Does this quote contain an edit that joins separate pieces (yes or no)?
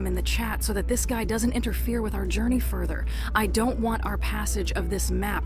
no